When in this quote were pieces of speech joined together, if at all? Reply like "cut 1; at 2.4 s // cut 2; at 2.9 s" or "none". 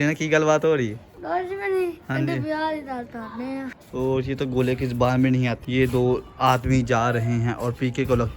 cut 1; at 3.8 s // cut 2; at 5.6 s